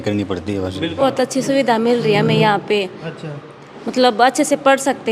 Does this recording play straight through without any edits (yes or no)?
no